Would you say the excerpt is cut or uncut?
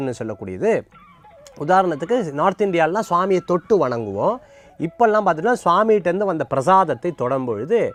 uncut